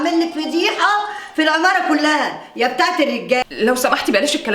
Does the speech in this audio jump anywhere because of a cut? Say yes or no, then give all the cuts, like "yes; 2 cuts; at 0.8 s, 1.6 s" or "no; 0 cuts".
yes; 1 cut; at 3.4 s